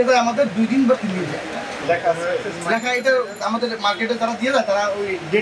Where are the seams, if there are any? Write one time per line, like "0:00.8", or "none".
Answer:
0:01.8

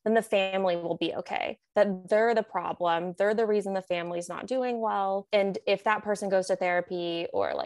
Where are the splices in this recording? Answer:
0:05.2

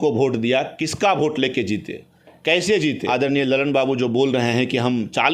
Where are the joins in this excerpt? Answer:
0:03.0

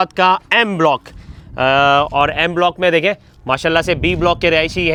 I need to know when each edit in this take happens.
none

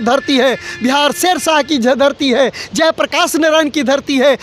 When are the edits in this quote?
none

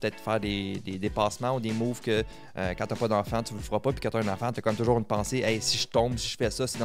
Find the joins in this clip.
none

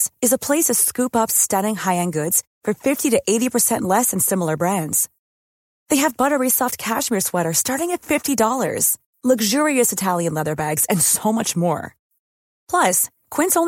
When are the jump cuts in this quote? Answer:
none

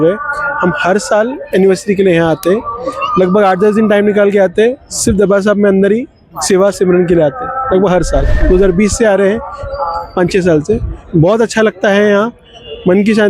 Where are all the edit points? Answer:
0:08.3

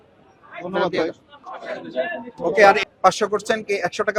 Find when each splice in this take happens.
0:02.8

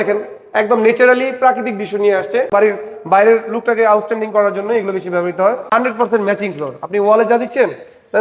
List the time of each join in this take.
0:02.5
0:05.6

